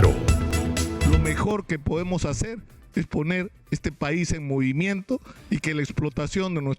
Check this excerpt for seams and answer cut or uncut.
cut